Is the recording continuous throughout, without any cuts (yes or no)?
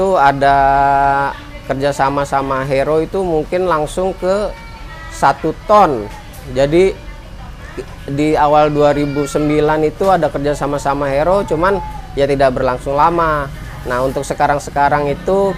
yes